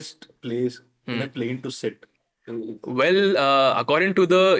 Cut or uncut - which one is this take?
uncut